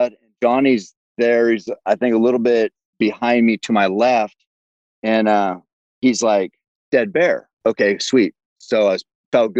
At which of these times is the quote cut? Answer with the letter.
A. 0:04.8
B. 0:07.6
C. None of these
B